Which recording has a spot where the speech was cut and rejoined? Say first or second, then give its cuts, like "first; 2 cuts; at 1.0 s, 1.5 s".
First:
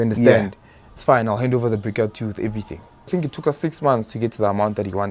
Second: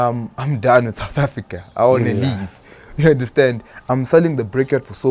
first; 1 cut; at 3.1 s